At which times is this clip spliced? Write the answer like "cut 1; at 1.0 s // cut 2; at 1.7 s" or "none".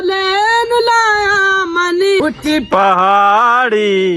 cut 1; at 2.2 s